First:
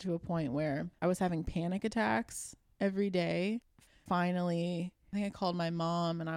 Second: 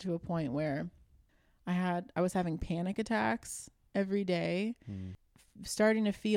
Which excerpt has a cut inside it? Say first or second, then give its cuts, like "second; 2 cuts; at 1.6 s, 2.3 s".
first; 3 cuts; at 0.9 s, 4.0 s, 5.0 s